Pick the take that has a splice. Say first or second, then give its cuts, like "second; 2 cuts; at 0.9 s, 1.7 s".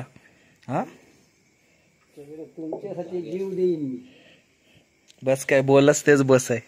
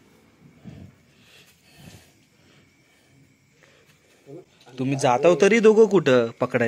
second; 1 cut; at 4.5 s